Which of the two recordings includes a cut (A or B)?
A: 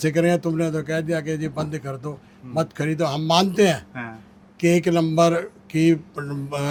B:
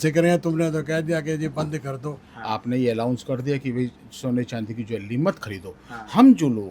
B